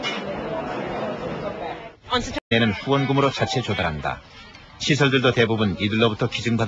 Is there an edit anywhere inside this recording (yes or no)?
no